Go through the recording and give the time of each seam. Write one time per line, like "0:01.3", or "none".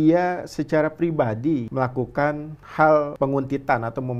0:01.7
0:03.1